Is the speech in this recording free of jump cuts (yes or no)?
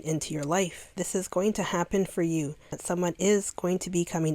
no